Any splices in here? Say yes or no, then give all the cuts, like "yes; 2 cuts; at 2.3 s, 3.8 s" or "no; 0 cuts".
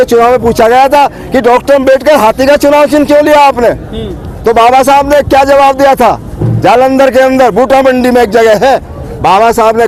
no; 0 cuts